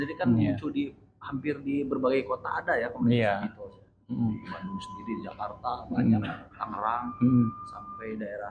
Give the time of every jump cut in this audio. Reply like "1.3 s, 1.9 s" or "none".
none

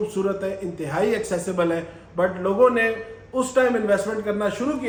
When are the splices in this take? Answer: none

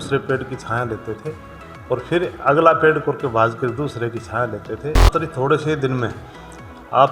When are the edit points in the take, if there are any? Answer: 5.1 s

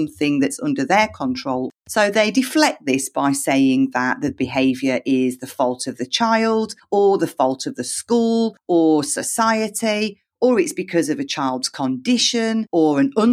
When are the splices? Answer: 1.7 s

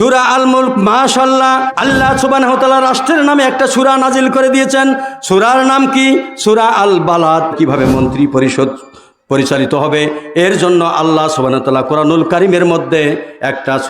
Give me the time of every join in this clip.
1.7 s, 7.5 s

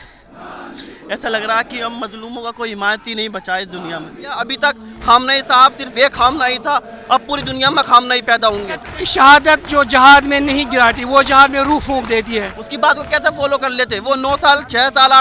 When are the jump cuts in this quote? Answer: 4.5 s, 9.0 s, 12.6 s

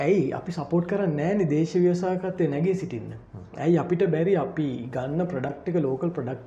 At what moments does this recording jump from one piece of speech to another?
none

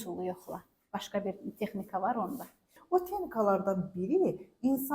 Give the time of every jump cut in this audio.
2.8 s

